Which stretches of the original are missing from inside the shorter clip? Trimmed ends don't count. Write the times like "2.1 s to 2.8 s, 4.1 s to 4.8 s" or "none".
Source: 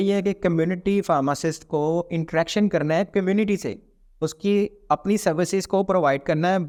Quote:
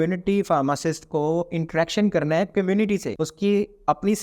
3.8 s to 4.2 s